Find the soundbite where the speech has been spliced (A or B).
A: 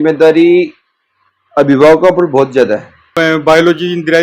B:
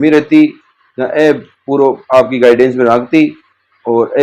A